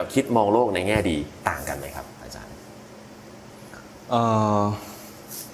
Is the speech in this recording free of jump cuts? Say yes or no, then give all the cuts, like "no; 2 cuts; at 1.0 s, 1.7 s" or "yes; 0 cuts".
yes; 0 cuts